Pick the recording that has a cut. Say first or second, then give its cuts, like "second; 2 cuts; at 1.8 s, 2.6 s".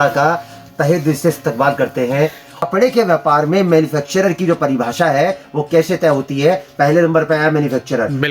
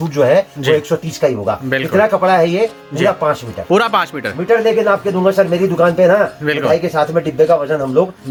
first; 1 cut; at 2.6 s